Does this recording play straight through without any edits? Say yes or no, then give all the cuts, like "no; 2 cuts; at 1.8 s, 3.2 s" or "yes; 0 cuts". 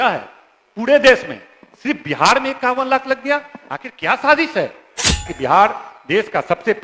no; 1 cut; at 5.3 s